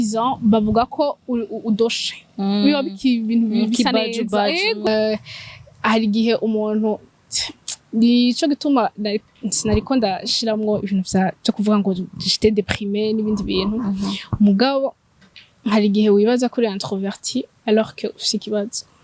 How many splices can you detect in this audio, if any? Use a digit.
1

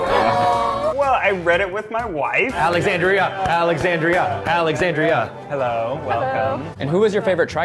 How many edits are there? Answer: 1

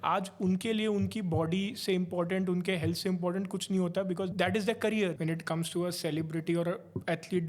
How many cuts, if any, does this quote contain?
2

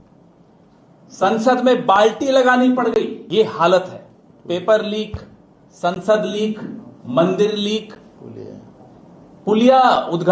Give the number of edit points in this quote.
1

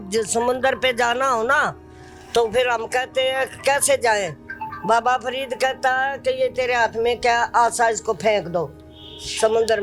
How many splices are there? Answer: 0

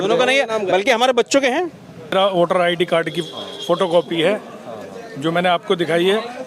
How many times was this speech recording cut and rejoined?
1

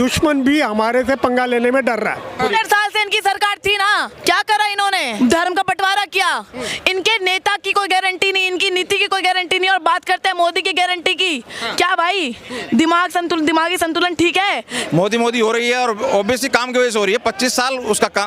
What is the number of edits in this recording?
4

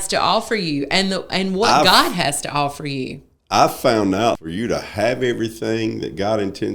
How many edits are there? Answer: 1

